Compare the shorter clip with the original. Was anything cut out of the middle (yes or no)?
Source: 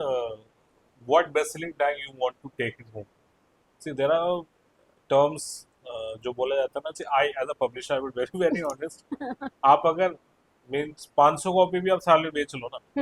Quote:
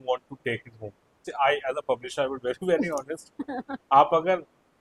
yes